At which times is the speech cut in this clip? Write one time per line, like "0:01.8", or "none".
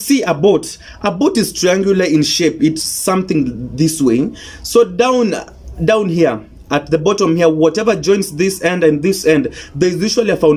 none